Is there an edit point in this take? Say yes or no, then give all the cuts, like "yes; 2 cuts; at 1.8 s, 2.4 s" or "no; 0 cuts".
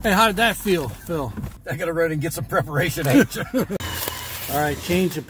yes; 2 cuts; at 1.6 s, 3.8 s